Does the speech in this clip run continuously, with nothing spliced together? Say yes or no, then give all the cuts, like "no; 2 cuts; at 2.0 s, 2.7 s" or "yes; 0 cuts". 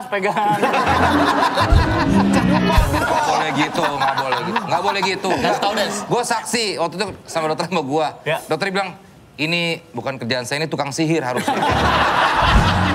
yes; 0 cuts